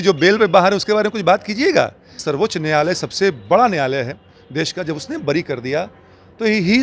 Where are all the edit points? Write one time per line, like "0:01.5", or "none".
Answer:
0:02.2

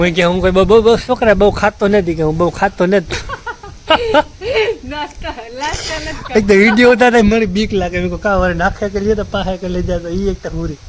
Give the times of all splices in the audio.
none

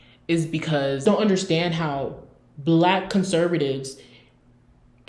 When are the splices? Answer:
0:01.0

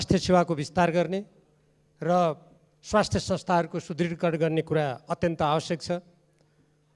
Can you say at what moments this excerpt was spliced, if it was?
none

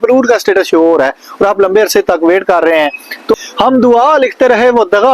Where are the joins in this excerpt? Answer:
0:03.3

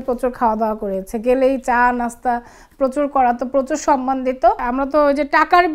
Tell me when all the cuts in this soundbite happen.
0:04.6

